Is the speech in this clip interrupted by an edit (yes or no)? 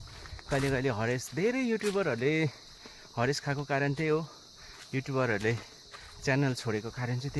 no